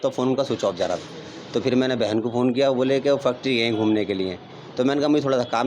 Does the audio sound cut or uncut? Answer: uncut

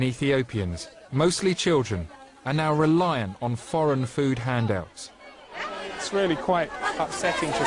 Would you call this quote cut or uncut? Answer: uncut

